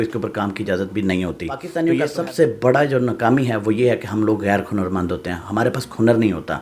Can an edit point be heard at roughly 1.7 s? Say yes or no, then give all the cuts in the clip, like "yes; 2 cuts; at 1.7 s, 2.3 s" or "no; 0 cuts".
yes; 1 cut; at 1.7 s